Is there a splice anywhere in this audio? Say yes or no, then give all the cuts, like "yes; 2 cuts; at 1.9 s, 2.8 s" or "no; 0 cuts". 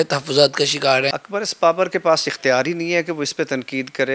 yes; 1 cut; at 1.2 s